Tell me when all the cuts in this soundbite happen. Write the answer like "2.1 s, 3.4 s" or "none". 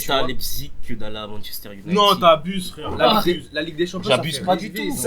none

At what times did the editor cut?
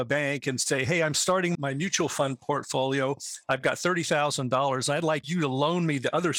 1.6 s, 5.2 s

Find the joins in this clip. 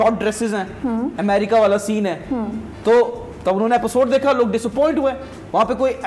none

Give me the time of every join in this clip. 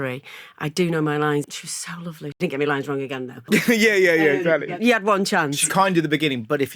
2.0 s, 3.5 s, 4.7 s

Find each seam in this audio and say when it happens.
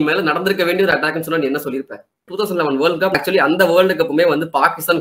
2.3 s, 3.2 s

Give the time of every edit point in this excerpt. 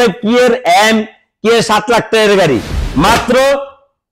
none

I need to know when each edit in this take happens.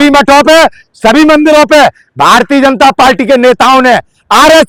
none

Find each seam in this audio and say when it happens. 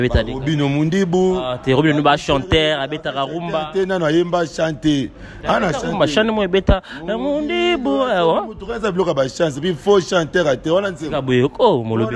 none

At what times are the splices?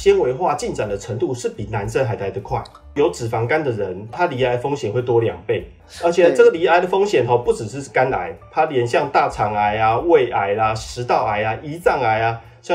2.9 s, 4.1 s

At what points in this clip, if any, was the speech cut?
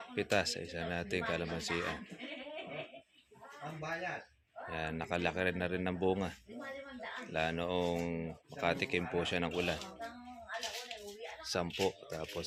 none

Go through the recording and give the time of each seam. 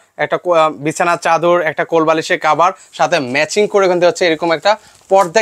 none

